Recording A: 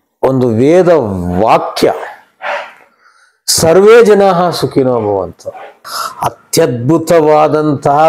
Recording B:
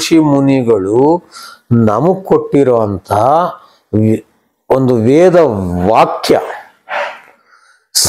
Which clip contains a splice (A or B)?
A